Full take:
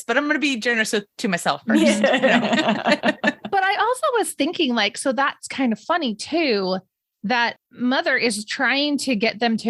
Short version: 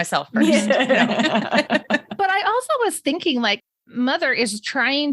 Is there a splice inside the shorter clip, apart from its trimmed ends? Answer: yes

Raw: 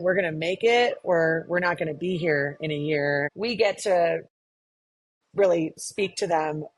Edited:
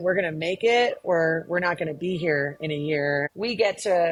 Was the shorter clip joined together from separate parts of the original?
no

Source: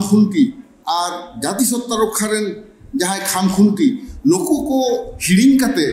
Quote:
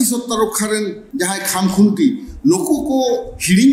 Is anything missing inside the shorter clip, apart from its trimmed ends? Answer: yes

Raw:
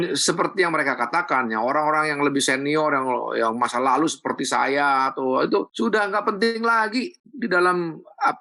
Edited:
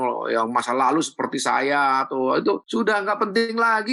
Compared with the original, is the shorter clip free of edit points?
yes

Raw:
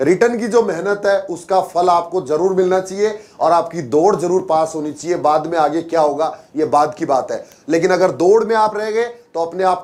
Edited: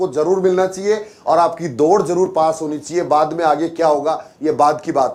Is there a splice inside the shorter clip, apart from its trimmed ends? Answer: no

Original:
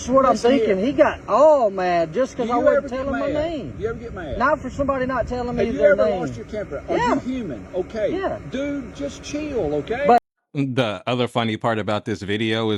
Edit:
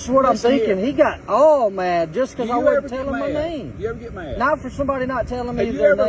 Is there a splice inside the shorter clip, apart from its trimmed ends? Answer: no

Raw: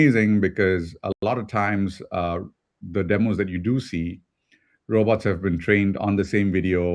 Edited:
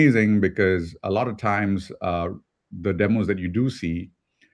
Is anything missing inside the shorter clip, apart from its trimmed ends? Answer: yes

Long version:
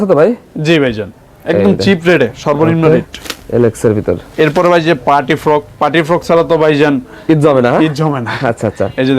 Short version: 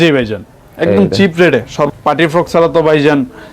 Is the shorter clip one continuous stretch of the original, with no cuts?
no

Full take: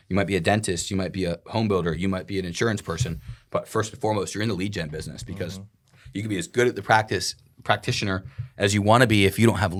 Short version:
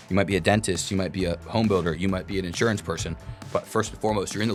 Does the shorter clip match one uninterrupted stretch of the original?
yes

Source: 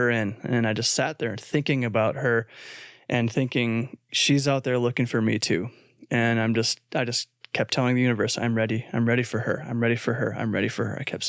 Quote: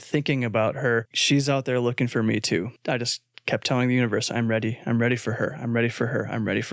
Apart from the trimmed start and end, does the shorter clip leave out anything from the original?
yes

